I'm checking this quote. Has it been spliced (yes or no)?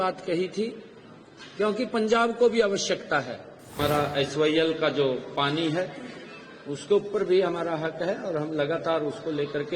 yes